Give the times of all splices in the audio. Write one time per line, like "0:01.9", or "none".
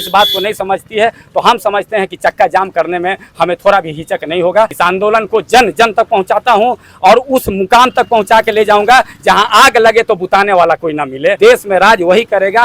0:04.7
0:11.4